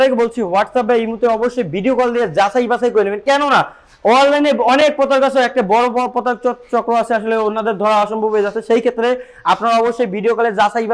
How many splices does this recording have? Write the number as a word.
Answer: zero